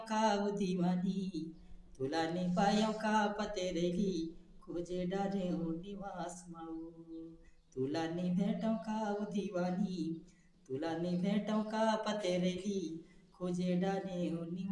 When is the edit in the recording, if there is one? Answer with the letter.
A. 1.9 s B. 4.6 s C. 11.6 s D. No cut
D